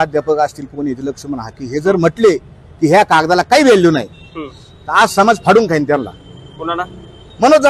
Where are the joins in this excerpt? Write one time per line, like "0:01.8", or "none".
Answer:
none